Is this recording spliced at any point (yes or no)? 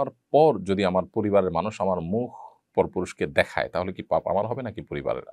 no